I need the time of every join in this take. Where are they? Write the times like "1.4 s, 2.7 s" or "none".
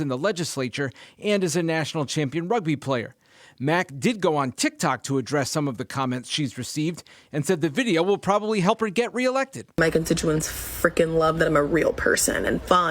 2.5 s